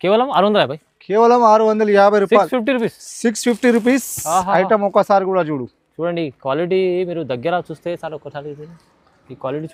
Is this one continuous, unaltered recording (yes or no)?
yes